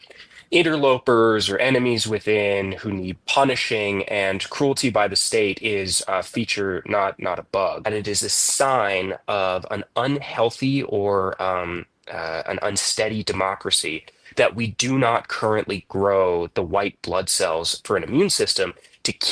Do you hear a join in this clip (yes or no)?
yes